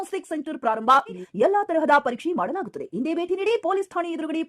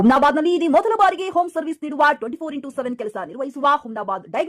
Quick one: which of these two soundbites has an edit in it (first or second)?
first